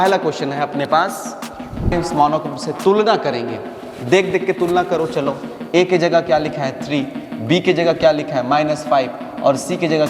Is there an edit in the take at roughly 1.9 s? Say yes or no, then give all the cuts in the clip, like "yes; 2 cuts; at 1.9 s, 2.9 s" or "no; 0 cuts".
yes; 1 cut; at 1.9 s